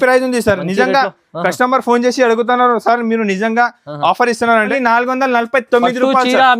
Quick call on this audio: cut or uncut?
cut